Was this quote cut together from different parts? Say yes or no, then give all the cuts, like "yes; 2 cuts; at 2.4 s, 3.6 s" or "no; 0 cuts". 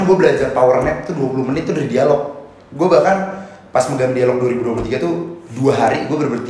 no; 0 cuts